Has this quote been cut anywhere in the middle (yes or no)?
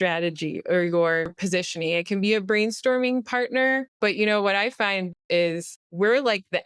yes